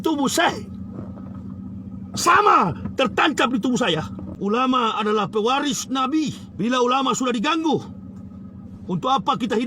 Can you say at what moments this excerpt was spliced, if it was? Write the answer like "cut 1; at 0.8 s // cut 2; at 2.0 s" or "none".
cut 1; at 4.2 s // cut 2; at 6.4 s